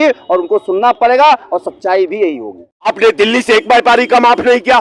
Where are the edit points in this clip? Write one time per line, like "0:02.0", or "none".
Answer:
0:02.9